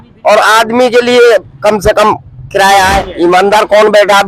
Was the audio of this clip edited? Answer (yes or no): yes